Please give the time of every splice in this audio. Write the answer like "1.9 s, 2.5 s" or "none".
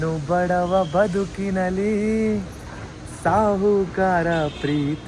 none

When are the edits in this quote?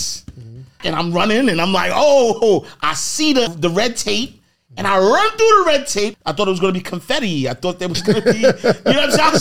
0.8 s, 3.5 s, 6.1 s

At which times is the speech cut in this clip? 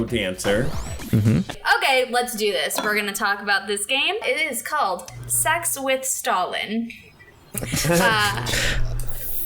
1.6 s, 4.2 s

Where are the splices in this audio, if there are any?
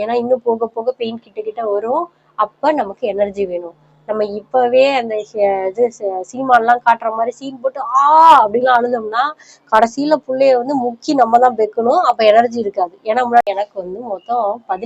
13.4 s

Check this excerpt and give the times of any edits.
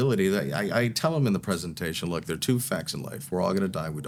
none

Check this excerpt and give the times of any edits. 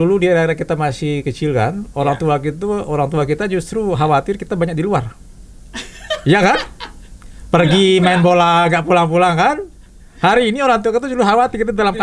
none

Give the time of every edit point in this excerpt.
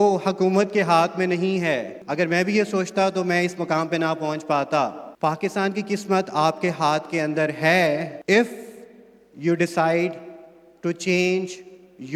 2.0 s, 5.0 s, 8.1 s

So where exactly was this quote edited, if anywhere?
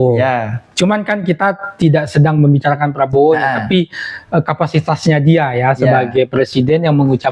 none

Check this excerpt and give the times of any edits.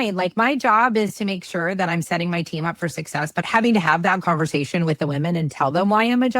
3.4 s

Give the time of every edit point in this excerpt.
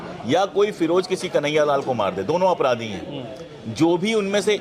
none

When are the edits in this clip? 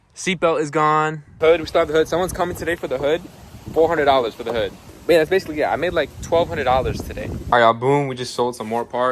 1.2 s, 4.9 s, 7.3 s

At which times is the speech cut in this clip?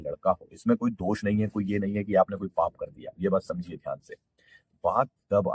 none

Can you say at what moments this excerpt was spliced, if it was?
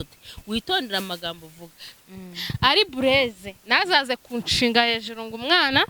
2.0 s

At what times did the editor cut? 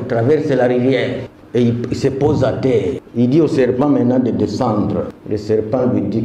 1.3 s, 3.0 s, 5.2 s

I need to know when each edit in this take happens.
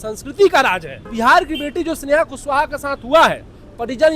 1.0 s

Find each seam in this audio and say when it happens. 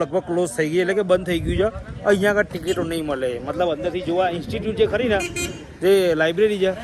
none

